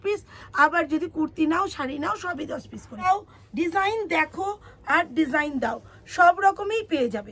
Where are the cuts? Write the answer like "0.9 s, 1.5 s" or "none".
3.0 s